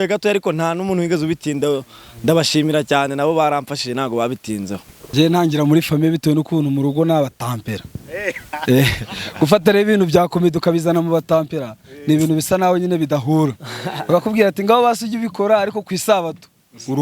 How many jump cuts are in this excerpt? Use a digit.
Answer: 1